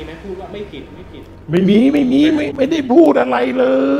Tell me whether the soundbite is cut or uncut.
cut